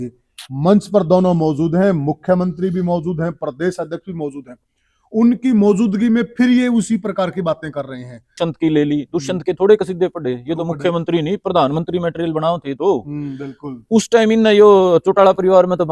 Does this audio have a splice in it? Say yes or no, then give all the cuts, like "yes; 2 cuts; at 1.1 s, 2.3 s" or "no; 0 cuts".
yes; 1 cut; at 8.4 s